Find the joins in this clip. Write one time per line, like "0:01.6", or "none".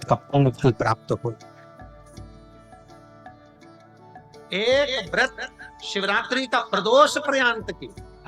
0:01.4
0:04.0